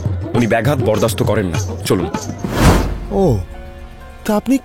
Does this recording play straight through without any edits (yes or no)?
no